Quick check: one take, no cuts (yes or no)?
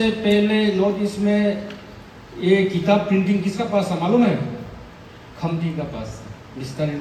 yes